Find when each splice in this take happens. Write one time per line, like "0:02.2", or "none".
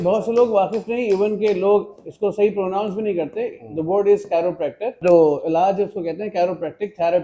0:05.0